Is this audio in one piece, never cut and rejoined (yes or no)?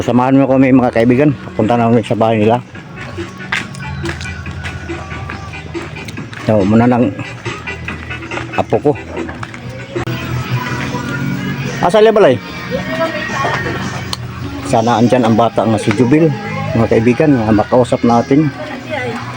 no